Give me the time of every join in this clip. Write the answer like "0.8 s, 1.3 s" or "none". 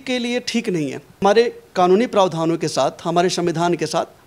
1.2 s